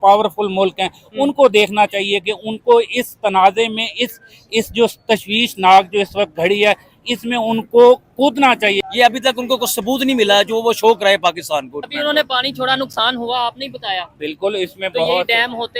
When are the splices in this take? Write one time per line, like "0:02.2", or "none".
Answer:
0:08.8
0:11.9